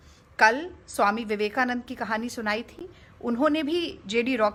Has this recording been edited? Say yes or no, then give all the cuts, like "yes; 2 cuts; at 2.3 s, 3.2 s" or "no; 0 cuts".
no; 0 cuts